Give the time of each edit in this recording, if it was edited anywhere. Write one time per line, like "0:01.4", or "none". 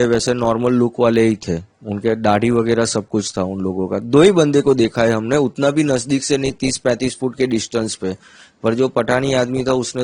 none